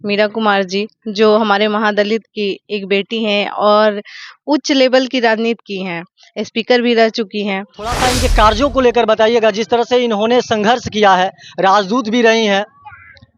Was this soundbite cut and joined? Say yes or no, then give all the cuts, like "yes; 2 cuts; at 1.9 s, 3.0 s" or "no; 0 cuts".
yes; 1 cut; at 7.9 s